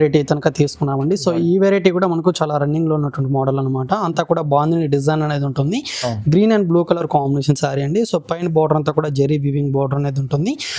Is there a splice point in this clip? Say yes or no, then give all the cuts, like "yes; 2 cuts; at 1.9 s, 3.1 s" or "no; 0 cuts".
no; 0 cuts